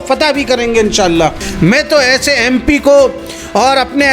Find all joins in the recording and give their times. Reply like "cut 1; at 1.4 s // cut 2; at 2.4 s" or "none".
cut 1; at 1.4 s